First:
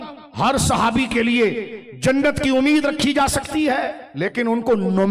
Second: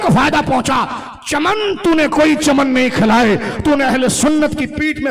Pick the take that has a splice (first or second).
first